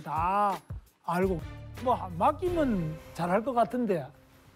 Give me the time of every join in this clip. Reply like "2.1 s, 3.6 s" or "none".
1.4 s